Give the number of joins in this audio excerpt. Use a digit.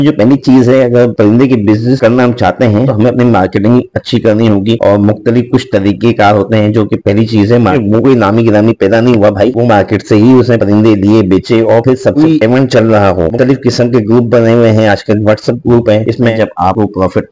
4